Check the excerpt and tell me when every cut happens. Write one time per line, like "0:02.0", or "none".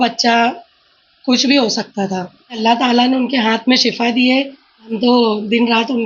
0:02.6
0:04.9